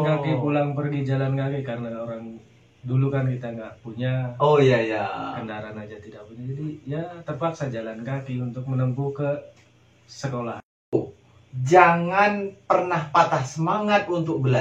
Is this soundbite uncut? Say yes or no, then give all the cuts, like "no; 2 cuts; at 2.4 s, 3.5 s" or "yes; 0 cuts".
no; 1 cut; at 10.9 s